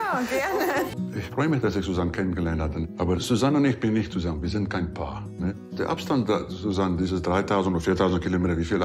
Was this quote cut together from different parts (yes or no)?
yes